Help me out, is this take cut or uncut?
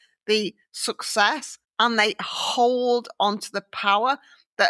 cut